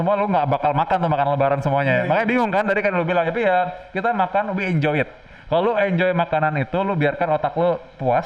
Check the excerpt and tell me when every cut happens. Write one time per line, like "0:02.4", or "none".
none